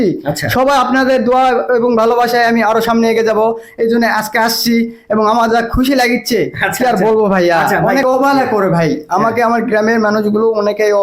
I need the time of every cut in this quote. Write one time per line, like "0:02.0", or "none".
0:08.0